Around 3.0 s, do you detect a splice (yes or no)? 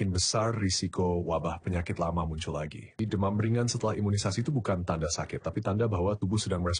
yes